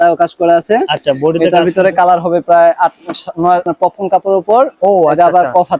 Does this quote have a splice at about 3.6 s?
yes; 1 cut; at 3.6 s

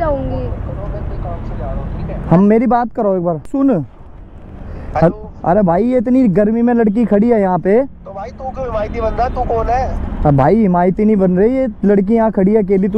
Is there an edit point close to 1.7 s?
no; 1 cut; at 3.5 s

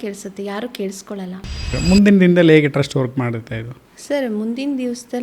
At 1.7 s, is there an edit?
yes; 1 cut; at 1.7 s

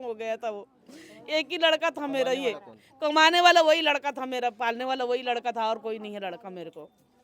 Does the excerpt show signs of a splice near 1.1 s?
no; 0 cuts

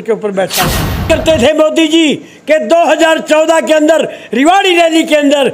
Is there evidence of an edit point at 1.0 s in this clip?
yes; 1 cut; at 1.0 s

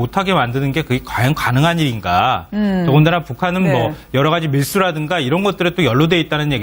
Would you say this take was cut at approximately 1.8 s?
no; 1 cut; at 4.9 s

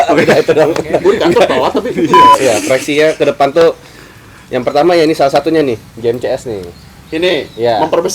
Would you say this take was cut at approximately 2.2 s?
yes; 1 cut; at 2.2 s

